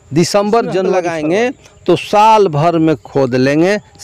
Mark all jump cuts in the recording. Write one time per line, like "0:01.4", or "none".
0:01.0